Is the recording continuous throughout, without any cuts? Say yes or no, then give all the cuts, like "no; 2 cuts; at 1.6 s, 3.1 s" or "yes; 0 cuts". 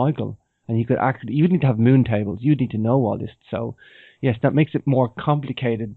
no; 1 cut; at 2.7 s